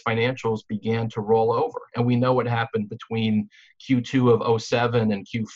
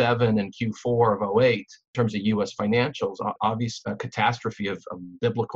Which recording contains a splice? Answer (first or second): second